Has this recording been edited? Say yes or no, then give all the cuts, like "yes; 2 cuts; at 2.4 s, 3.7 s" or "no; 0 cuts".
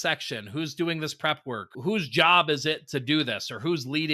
no; 0 cuts